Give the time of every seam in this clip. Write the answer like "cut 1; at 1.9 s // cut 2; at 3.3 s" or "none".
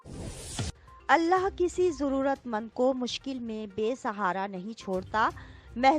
cut 1; at 0.9 s